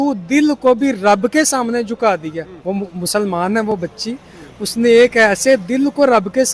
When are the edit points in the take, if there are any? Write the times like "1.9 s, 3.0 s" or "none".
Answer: 2.5 s